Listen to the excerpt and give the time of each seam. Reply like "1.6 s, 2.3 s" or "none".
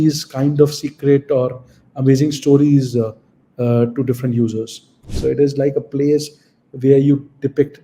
5.0 s